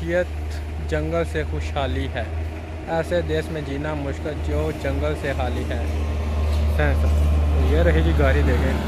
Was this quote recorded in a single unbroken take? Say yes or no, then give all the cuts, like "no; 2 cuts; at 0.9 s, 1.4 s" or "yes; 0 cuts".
yes; 0 cuts